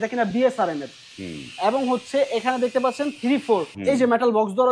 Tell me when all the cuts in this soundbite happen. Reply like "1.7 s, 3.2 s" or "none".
3.7 s

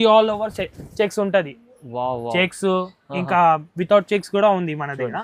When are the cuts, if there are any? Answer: none

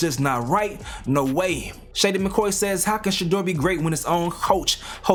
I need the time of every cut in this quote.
none

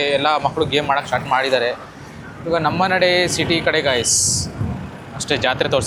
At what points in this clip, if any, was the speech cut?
none

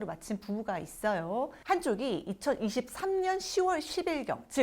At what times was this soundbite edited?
1.5 s

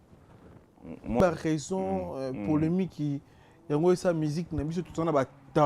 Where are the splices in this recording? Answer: 1.2 s

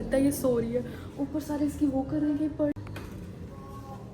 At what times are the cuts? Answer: 2.7 s

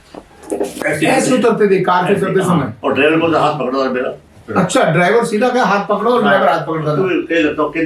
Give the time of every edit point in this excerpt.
none

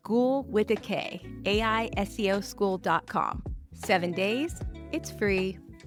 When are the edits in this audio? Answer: none

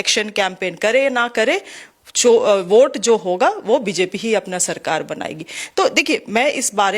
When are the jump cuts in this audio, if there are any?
none

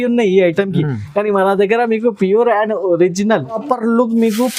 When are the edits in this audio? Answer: 3.6 s

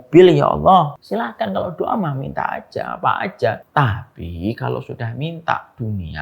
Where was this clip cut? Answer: 1.0 s, 3.6 s

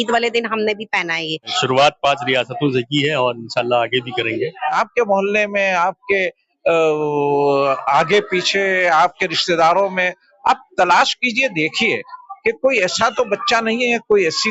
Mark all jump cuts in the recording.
1.6 s, 4.7 s

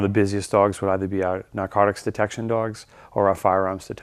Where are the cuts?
none

